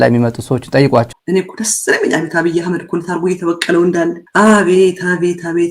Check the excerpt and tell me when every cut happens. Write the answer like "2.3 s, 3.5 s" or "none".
1.1 s